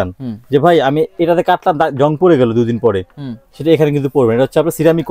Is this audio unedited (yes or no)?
yes